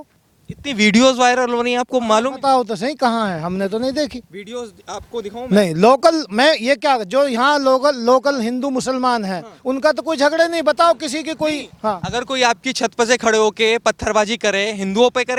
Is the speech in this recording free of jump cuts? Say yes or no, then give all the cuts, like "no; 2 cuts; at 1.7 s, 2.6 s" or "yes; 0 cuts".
yes; 0 cuts